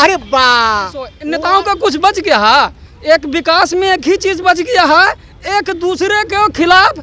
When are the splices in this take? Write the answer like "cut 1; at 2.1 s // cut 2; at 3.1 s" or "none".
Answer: cut 1; at 1.2 s